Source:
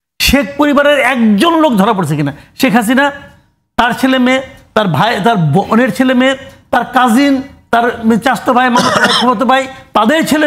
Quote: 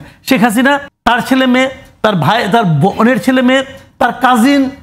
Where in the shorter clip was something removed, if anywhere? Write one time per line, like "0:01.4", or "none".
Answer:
0:00.9